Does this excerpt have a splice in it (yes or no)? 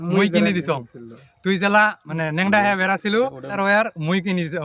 yes